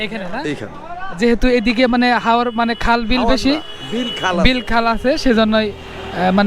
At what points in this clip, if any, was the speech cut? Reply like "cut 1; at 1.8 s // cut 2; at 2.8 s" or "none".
none